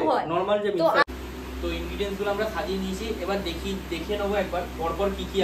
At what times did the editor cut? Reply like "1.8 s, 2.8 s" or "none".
1.0 s